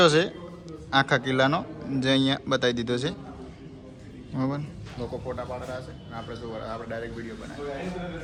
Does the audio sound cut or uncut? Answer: uncut